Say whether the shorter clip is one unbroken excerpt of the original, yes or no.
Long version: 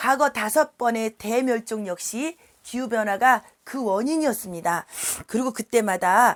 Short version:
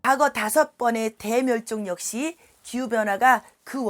yes